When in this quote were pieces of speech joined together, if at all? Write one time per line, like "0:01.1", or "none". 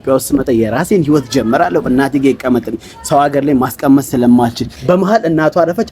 0:04.8